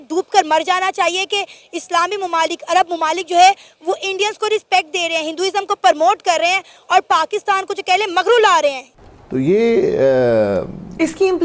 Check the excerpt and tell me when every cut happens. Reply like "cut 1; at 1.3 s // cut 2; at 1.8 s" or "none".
none